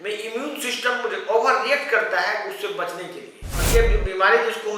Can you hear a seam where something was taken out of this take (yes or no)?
yes